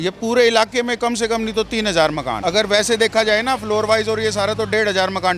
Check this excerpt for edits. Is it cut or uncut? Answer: cut